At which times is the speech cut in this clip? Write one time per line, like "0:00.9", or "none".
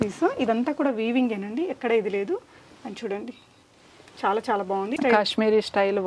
0:05.0